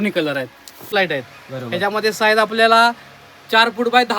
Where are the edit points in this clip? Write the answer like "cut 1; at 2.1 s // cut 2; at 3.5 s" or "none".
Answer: cut 1; at 0.9 s